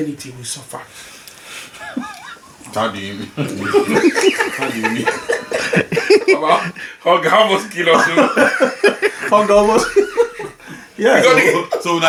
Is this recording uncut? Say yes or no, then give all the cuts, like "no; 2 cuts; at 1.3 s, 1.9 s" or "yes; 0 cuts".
yes; 0 cuts